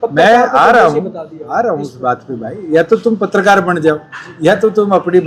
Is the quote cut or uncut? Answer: uncut